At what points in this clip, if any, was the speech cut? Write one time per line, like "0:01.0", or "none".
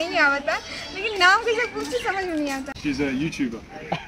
0:02.7